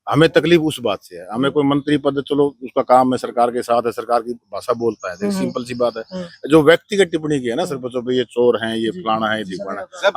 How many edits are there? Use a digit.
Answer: 0